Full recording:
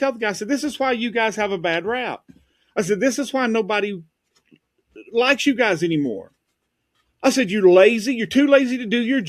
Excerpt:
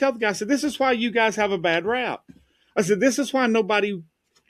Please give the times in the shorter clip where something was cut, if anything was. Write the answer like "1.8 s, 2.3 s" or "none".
none